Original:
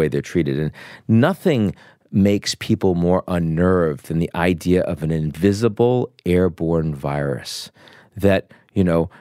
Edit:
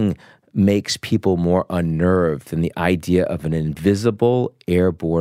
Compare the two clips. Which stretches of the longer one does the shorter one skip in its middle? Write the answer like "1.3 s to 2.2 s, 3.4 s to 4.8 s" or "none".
none